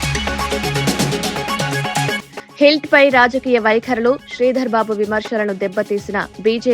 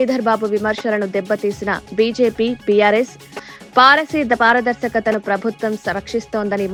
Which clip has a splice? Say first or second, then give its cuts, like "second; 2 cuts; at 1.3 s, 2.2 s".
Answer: first; 1 cut; at 2.2 s